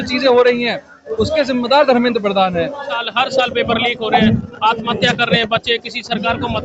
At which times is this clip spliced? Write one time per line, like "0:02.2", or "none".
0:02.9